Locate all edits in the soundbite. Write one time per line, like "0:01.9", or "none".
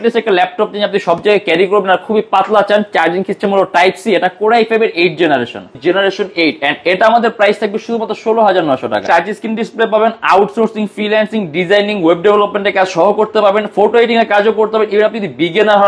0:05.7
0:09.0